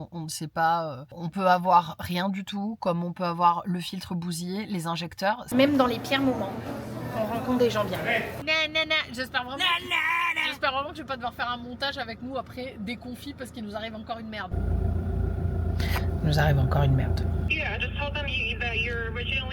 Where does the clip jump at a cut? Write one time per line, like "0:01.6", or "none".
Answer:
0:05.5
0:08.4
0:17.5